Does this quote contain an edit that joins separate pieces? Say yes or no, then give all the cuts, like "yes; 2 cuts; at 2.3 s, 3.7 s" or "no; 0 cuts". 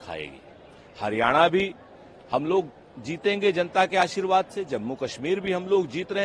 no; 0 cuts